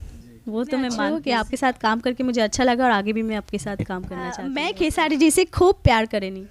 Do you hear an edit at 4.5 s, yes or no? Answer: yes